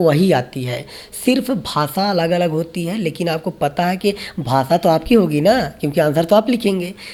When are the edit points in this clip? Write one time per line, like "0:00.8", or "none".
none